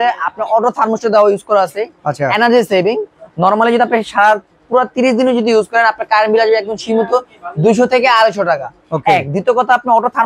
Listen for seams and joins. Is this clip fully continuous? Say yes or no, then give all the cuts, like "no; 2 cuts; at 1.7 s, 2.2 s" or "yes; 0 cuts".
yes; 0 cuts